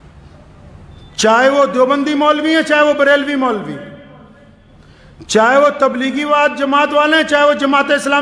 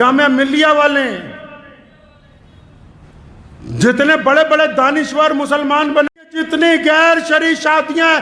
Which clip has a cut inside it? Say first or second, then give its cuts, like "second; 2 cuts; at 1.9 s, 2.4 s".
second; 1 cut; at 6.2 s